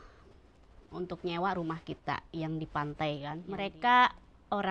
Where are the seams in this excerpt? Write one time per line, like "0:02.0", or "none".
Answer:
0:03.4